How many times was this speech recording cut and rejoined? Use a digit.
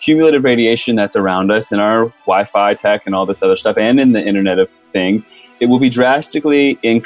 0